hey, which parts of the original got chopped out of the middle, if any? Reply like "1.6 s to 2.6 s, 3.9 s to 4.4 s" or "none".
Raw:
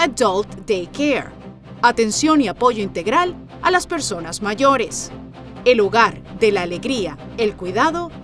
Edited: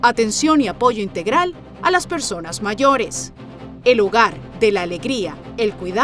none